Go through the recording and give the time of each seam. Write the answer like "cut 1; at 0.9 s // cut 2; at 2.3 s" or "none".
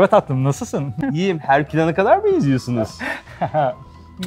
cut 1; at 1.0 s